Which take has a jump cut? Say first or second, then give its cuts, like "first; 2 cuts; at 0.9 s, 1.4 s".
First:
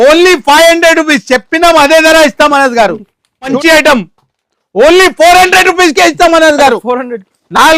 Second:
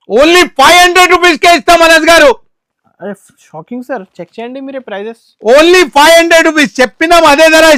first; 1 cut; at 3.5 s